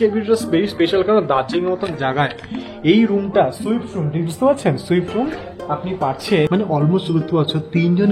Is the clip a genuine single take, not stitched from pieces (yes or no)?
no